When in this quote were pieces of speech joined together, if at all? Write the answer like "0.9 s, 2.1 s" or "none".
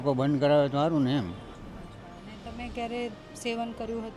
1.5 s